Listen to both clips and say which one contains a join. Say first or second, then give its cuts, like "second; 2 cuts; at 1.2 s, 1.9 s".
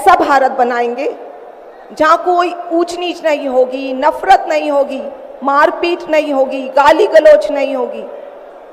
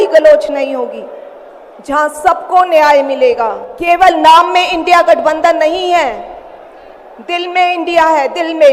second; 1 cut; at 3.7 s